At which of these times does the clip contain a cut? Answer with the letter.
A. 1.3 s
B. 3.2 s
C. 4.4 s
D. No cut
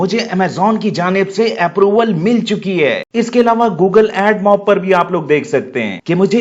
B